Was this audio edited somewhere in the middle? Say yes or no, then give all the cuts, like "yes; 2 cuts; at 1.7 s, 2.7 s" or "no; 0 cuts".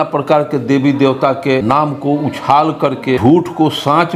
yes; 2 cuts; at 1.6 s, 3.2 s